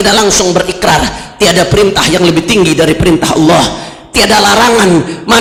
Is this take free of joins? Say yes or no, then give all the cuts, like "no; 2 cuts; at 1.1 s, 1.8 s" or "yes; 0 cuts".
yes; 0 cuts